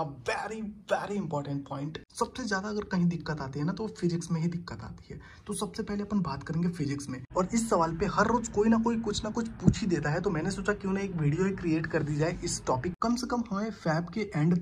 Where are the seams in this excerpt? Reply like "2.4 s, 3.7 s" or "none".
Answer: 2.0 s, 7.2 s, 12.9 s